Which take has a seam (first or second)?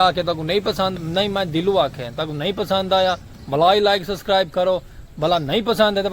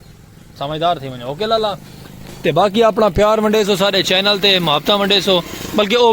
first